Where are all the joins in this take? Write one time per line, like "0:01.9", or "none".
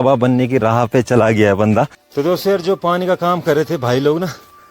0:02.0